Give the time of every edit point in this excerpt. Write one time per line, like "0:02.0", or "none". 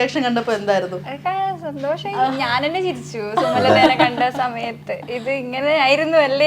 none